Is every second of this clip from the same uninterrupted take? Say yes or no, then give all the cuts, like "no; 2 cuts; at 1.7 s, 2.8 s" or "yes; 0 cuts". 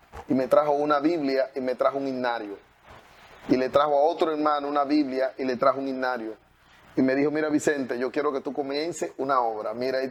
yes; 0 cuts